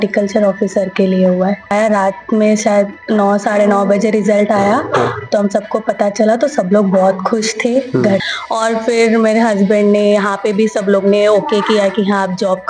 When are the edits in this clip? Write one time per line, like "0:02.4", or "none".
0:01.7
0:08.2